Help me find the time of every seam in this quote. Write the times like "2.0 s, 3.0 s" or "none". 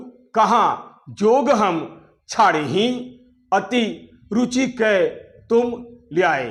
none